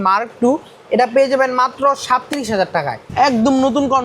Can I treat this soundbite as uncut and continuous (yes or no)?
no